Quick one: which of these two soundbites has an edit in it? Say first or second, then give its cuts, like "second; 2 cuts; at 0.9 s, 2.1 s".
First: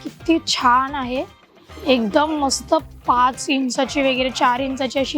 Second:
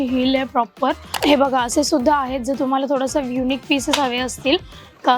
second; 1 cut; at 1.1 s